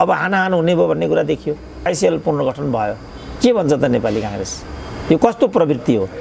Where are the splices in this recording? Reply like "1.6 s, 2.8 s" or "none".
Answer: 1.9 s